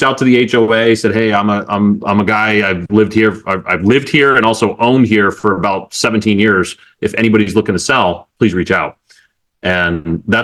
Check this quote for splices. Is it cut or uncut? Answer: uncut